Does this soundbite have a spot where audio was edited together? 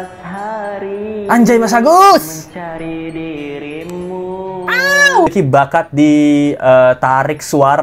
yes; 1 cut; at 5.3 s

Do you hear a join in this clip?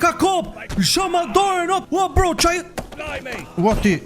yes; 1 cut; at 1.8 s

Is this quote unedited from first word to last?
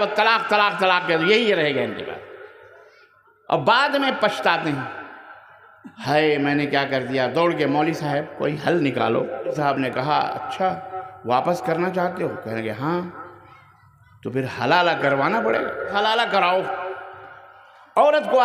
no; 2 cuts; at 9.6 s, 15.9 s

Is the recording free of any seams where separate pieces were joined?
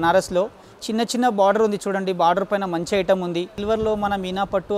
no; 1 cut; at 3.6 s

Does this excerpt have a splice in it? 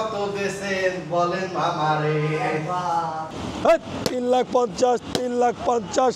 yes; 1 cut; at 3.3 s

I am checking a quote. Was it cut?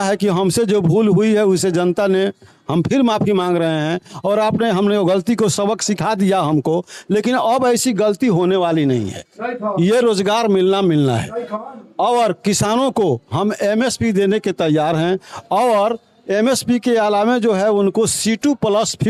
no; 0 cuts

